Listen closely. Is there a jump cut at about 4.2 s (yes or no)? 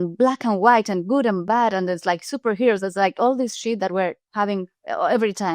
yes